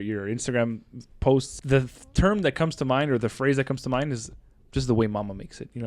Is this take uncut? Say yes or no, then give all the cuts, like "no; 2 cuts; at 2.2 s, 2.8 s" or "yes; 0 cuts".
no; 1 cut; at 1.6 s